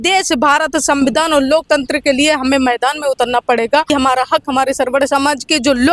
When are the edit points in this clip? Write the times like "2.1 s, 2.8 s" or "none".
3.9 s